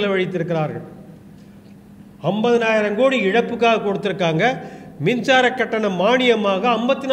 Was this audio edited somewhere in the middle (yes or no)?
no